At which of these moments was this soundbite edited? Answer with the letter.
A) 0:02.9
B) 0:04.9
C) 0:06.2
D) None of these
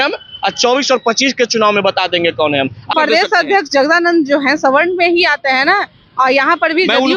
A